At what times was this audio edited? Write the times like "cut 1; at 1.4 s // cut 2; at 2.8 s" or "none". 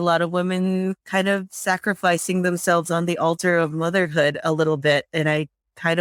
none